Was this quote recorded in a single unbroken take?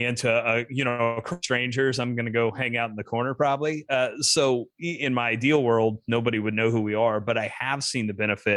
yes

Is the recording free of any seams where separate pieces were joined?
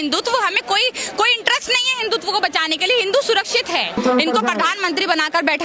no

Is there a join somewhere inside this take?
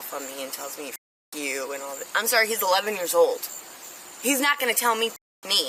no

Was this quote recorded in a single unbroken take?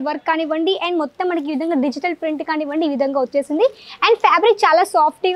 yes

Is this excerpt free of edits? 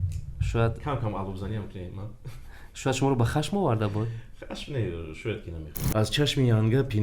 no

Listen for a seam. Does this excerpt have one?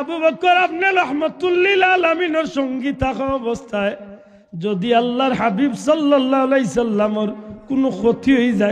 no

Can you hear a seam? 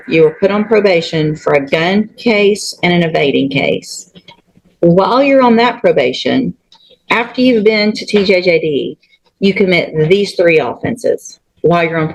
no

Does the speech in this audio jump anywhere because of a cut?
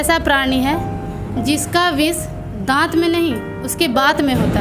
no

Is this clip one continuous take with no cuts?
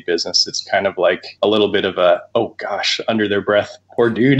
no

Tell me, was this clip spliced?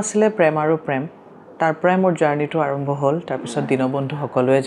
no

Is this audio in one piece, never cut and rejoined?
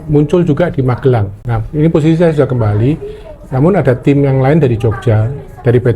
yes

